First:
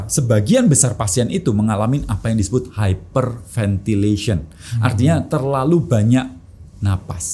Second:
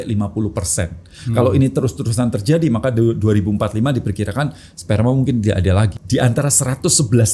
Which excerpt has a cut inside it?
second; 1 cut; at 6.0 s

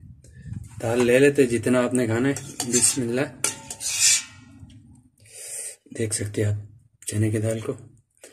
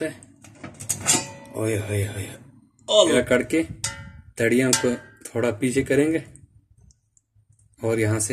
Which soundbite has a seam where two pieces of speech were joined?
second; 1 cut; at 3.1 s

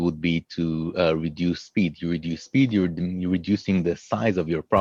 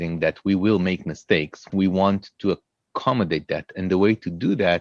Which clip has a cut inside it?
second; 1 cut; at 1.6 s

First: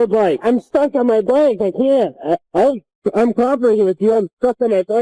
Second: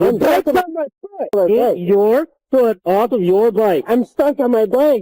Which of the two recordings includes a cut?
second; 1 cut; at 1.3 s

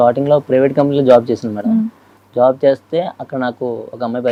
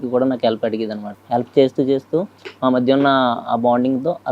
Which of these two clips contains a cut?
second; 1 cut; at 1.0 s

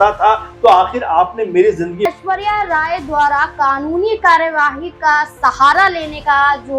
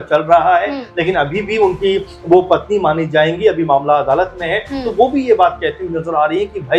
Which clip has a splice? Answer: first; 1 cut; at 2.1 s

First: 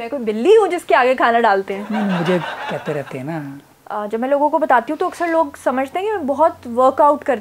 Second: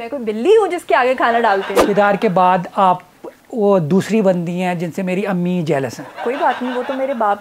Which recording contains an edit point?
second; 2 cuts; at 1.7 s, 6.2 s

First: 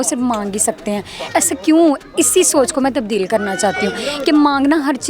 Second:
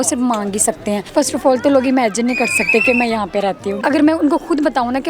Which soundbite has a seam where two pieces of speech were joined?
second; 2 cuts; at 1.1 s, 3.7 s

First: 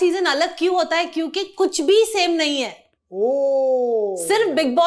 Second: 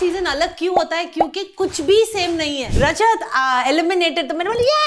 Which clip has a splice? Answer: second; 1 cut; at 2.7 s

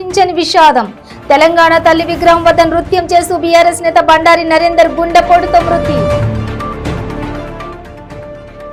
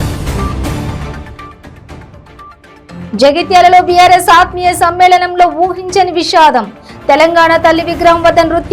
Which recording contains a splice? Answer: second; 1 cut; at 2.6 s

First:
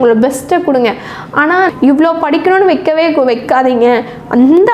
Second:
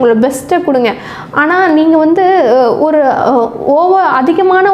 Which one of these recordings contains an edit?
first; 1 cut; at 1.7 s

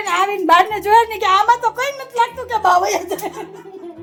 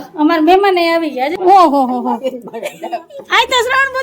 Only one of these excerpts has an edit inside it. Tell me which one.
second; 1 cut; at 1.3 s

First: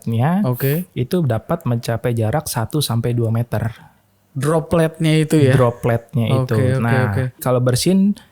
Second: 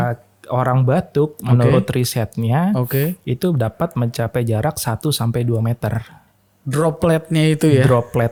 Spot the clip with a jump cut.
first; 1 cut; at 7.4 s

